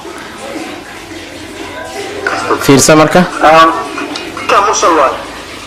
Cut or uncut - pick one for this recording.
uncut